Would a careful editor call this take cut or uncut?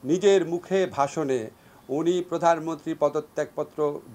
uncut